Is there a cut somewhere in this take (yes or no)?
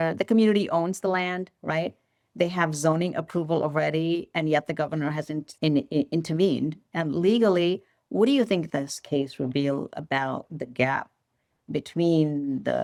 no